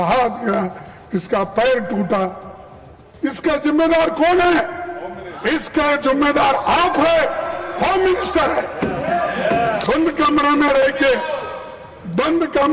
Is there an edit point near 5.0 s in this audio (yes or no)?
no